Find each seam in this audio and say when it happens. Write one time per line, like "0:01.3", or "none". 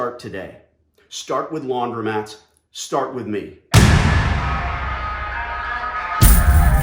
0:03.6